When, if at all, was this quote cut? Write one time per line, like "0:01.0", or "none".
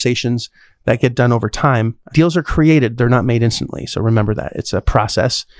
0:02.0
0:04.5